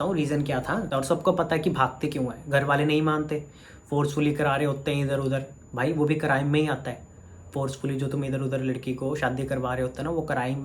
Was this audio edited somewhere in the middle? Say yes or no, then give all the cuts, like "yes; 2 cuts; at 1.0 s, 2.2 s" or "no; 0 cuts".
yes; 1 cut; at 0.9 s